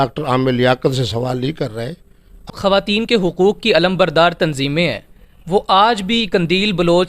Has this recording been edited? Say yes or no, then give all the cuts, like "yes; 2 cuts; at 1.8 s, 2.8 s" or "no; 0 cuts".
yes; 1 cut; at 2.5 s